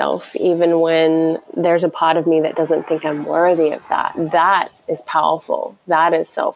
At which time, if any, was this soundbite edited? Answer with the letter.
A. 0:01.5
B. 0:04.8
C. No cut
B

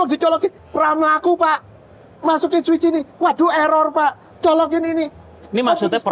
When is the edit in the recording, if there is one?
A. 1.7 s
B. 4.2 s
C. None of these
C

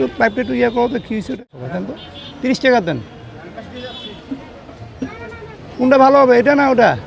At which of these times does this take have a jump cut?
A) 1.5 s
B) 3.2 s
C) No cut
A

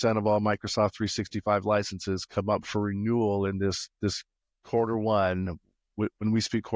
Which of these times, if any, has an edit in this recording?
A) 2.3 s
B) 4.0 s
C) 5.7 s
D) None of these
D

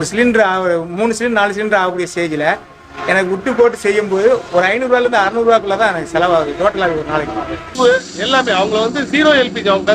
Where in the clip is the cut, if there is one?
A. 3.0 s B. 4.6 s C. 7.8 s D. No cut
C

